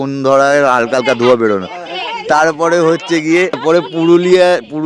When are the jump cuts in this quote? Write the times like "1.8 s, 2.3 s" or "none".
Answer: 3.6 s